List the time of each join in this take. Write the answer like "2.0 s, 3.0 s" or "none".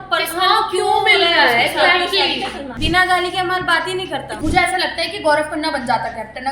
2.7 s, 4.3 s